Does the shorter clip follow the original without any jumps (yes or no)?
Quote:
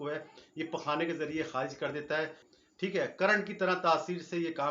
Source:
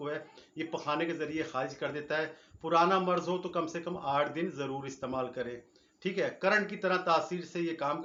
no